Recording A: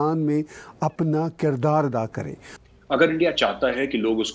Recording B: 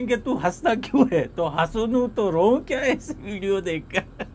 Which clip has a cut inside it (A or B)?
A